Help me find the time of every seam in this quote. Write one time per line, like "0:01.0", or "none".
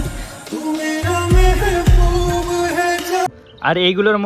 0:03.3